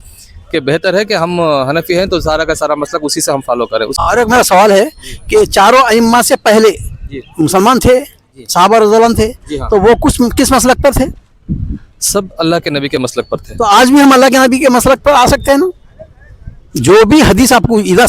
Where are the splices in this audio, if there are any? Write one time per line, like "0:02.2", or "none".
0:04.0